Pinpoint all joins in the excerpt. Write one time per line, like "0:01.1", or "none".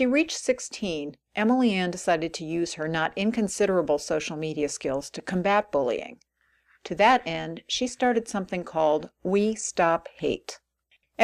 none

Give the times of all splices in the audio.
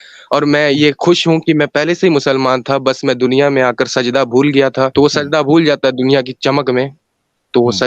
0:04.9

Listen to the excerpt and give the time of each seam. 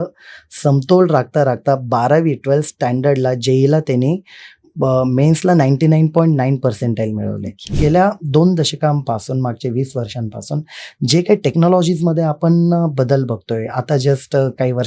0:07.7

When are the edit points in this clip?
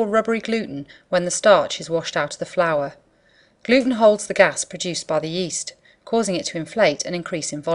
0:06.2

